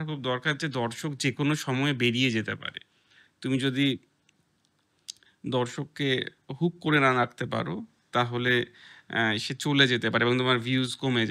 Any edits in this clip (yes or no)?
no